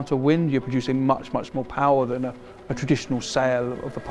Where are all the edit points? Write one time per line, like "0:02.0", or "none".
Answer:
none